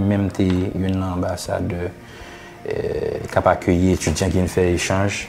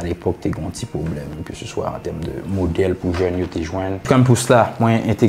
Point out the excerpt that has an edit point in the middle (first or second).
second